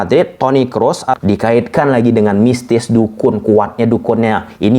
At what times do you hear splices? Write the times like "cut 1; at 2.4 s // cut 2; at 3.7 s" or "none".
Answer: cut 1; at 1.2 s